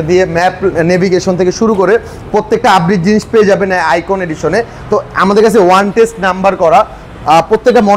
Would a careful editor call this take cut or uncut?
uncut